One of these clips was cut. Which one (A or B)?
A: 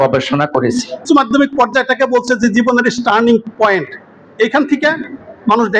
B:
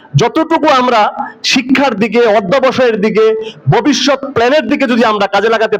A